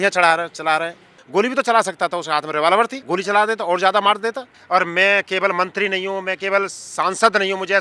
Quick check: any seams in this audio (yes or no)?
yes